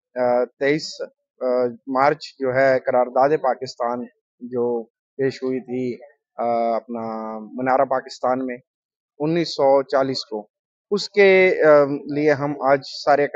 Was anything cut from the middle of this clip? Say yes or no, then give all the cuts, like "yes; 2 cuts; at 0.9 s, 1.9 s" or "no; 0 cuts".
no; 0 cuts